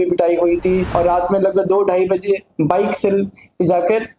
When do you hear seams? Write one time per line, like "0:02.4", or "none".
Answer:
0:00.9

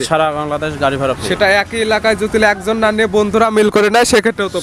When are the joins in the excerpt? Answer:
none

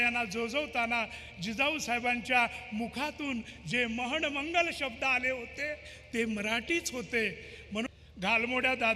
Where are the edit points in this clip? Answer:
0:07.9

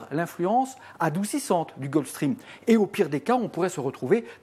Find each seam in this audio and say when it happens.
0:02.1

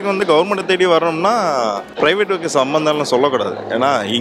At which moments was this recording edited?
0:01.9

